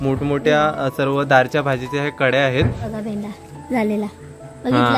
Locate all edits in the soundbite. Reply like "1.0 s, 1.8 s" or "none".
2.9 s